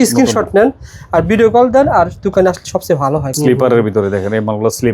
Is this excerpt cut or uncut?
cut